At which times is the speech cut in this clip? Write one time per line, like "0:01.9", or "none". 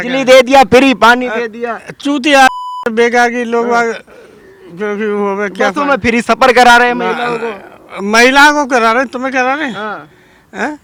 none